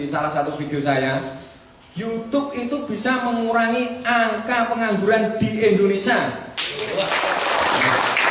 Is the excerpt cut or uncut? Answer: uncut